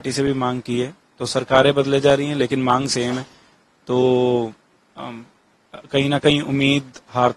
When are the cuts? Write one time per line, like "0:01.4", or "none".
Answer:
none

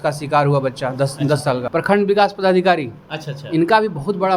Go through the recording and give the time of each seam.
0:01.7

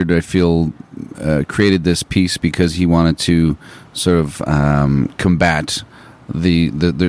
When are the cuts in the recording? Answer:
none

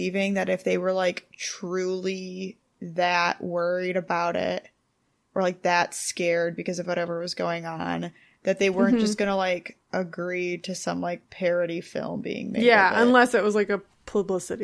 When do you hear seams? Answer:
0:09.8
0:11.3

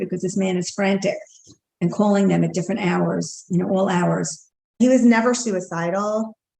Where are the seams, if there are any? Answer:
0:04.8

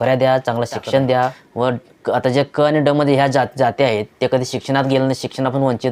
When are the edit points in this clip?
0:01.4

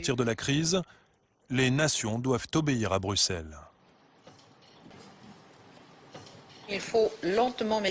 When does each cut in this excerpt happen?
0:04.9

